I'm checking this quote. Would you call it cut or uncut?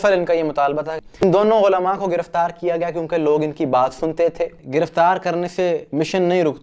cut